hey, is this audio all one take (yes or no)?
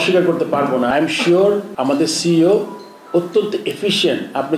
no